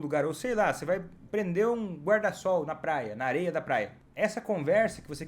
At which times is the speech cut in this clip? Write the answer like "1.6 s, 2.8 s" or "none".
4.0 s